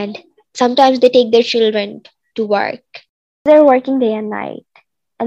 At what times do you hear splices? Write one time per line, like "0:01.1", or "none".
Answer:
0:03.4